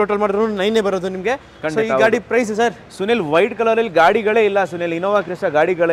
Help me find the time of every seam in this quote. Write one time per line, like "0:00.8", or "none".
none

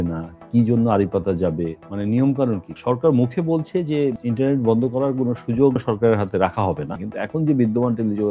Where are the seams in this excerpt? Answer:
0:01.8
0:02.7
0:04.2
0:05.8
0:07.0

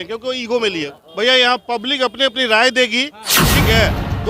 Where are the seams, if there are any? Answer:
0:00.9

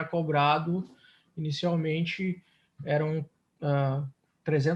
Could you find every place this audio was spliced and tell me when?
none

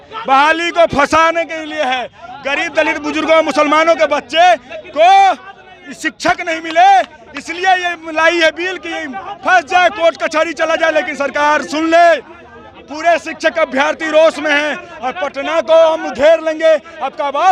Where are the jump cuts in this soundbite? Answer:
none

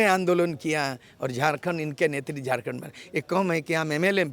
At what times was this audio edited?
none

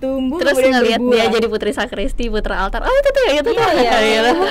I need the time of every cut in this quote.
none

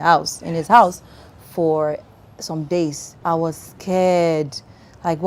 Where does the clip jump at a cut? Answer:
0:03.1

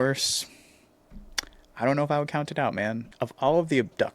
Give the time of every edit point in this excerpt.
0:03.1

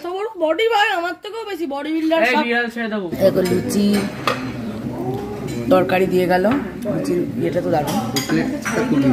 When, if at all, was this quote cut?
0:03.1

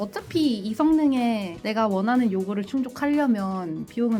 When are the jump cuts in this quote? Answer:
none

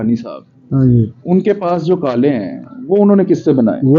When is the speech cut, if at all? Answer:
none

